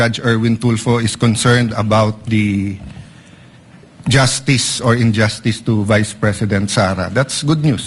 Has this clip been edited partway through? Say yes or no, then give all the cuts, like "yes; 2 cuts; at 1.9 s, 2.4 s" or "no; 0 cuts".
no; 0 cuts